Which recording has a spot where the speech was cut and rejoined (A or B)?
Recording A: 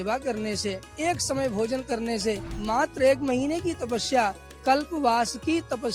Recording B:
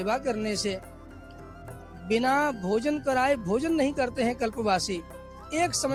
A